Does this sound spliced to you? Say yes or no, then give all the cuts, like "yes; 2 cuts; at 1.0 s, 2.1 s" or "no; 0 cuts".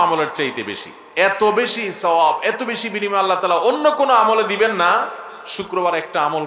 no; 0 cuts